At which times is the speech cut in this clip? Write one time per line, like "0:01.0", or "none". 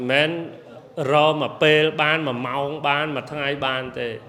none